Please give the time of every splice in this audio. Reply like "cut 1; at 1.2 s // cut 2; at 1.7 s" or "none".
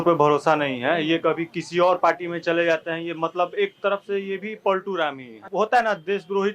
cut 1; at 5.4 s